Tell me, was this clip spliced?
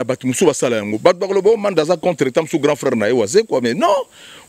no; 0 cuts

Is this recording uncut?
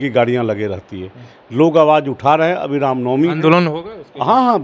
yes; 0 cuts

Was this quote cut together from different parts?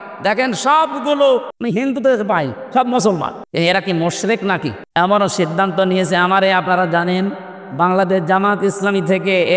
yes; 3 cuts; at 1.5 s, 3.4 s, 4.8 s

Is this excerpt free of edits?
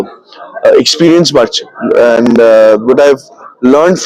yes; 0 cuts

